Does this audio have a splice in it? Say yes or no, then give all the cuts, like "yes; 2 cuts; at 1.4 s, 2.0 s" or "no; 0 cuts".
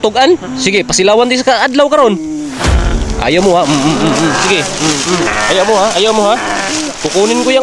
yes; 1 cut; at 2.6 s